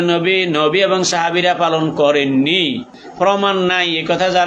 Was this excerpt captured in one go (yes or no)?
no